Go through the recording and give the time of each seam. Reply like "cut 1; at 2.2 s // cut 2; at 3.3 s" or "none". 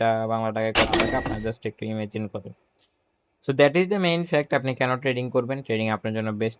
none